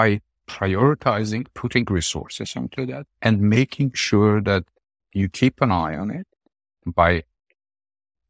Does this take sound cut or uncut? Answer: uncut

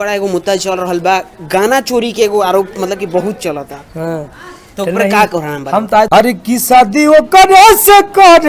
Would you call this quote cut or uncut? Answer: cut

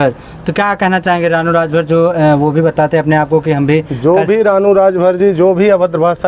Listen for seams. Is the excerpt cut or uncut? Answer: uncut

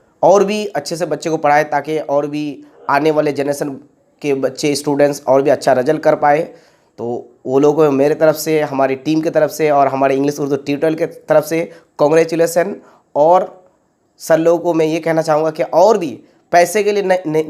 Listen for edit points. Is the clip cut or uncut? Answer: uncut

